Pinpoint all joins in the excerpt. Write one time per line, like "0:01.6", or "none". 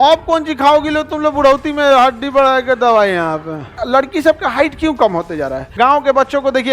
0:03.7
0:05.7